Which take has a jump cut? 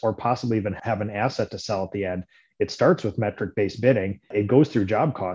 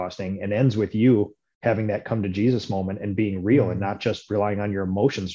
first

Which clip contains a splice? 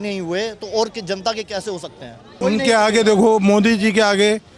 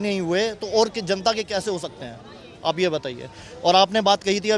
first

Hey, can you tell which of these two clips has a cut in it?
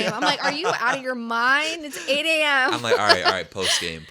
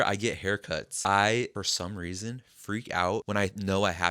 second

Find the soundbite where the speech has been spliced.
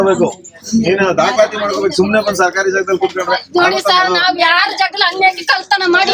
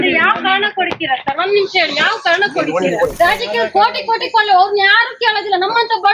second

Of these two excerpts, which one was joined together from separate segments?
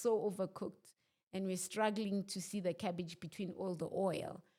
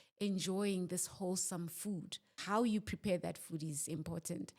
second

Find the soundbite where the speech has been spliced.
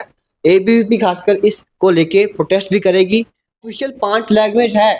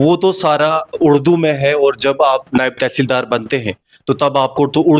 first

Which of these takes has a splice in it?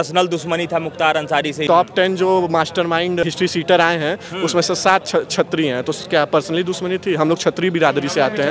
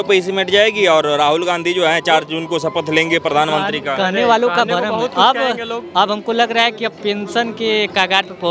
first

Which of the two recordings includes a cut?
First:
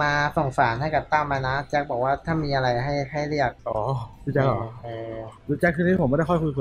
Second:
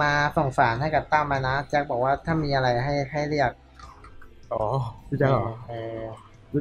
first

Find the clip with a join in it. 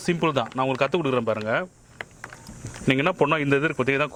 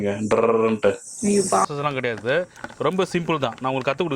second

